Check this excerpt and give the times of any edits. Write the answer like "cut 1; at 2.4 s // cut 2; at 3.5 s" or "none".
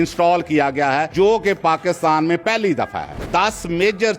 cut 1; at 1.1 s // cut 2; at 3.2 s